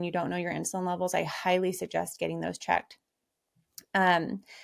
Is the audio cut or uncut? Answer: uncut